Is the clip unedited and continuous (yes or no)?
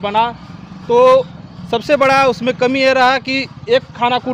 yes